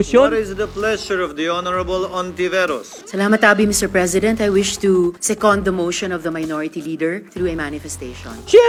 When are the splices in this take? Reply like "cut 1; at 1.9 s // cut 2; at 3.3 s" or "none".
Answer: none